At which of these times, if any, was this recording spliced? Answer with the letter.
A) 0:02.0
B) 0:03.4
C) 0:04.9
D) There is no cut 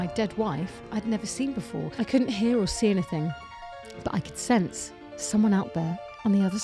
A